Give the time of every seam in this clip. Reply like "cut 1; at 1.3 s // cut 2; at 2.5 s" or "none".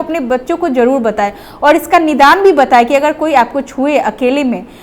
none